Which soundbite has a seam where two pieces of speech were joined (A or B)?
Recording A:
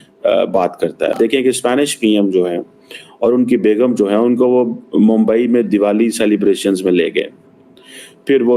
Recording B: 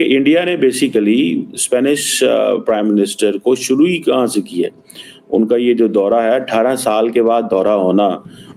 A